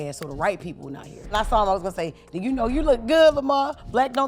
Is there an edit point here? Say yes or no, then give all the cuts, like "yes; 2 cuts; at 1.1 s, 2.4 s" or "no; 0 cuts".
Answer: yes; 1 cut; at 1.3 s